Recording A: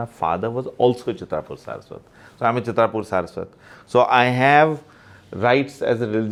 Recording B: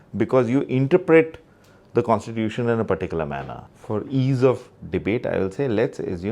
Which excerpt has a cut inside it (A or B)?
B